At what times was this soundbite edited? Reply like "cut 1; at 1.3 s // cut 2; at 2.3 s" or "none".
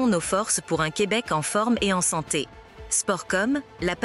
none